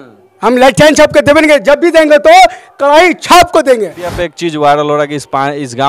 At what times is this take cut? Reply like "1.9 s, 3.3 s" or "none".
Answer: 4.1 s